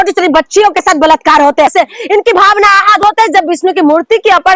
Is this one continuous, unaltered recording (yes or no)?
no